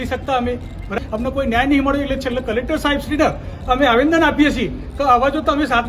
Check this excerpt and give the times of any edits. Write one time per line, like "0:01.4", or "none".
0:01.0